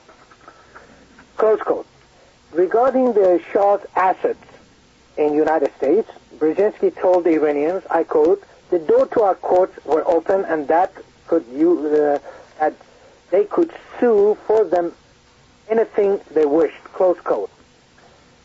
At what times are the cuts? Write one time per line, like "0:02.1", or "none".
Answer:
0:08.1